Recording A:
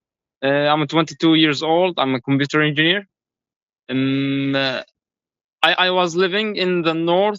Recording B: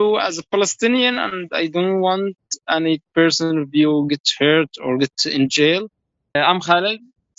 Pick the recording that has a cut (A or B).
B